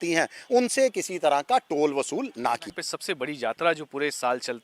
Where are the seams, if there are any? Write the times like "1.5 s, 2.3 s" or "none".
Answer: 2.7 s